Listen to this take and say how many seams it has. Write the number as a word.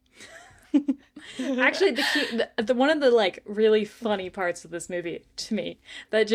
zero